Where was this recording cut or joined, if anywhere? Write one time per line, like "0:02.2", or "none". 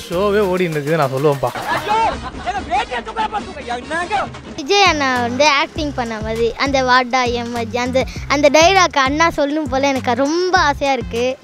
0:01.6
0:04.5